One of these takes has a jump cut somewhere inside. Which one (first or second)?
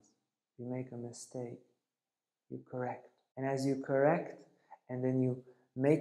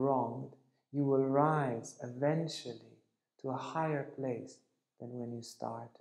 first